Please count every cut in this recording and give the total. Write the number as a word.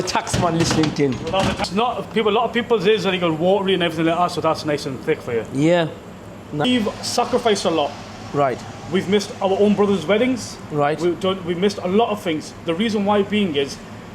two